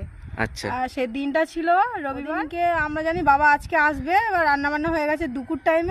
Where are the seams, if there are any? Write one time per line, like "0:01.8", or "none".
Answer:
0:02.2